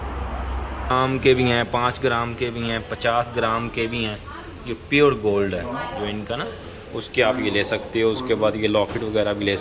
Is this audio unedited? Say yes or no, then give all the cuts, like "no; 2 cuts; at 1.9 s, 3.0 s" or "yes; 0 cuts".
no; 1 cut; at 0.9 s